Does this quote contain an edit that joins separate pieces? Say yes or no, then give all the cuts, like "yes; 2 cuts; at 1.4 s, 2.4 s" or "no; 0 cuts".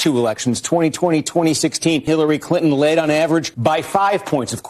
yes; 2 cuts; at 2.1 s, 3.5 s